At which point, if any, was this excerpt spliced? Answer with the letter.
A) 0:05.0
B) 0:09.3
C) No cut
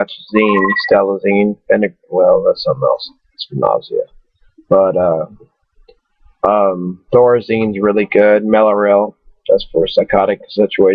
C